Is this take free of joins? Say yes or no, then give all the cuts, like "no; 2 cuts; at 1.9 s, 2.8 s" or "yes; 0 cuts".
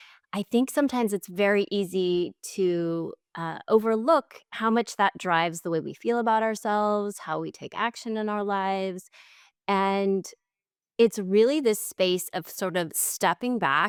yes; 0 cuts